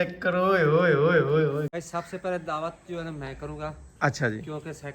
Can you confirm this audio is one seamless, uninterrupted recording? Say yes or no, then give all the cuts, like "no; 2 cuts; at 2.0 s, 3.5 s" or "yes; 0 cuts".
no; 1 cut; at 1.7 s